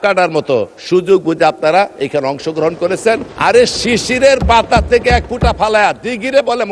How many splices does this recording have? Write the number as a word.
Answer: two